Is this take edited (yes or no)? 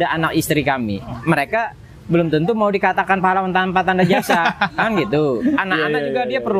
yes